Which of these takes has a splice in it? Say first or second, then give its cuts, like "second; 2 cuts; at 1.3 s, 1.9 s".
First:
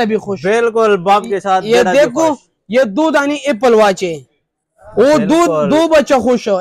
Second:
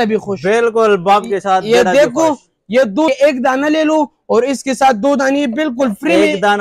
second; 1 cut; at 3.1 s